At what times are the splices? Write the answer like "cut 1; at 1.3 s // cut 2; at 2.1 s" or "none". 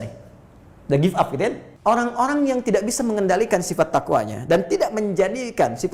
cut 1; at 1.7 s